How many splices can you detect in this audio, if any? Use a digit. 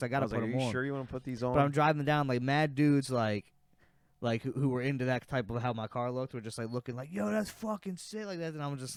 0